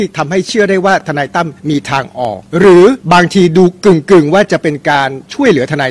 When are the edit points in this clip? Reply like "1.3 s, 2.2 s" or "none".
1.6 s, 2.4 s, 3.0 s